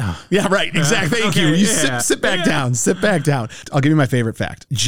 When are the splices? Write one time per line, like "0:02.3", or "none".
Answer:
0:03.6